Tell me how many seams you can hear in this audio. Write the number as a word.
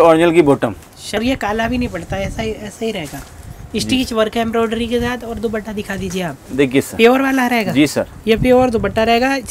one